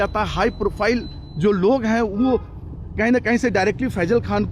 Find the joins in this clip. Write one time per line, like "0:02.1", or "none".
none